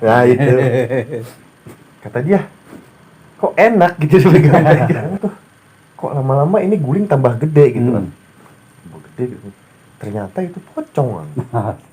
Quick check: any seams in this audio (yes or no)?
yes